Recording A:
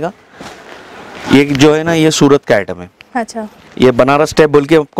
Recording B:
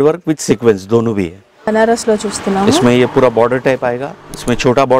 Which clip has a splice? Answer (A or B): B